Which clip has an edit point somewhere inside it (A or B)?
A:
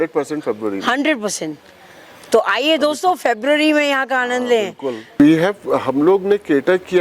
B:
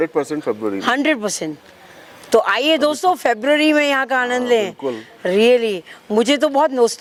A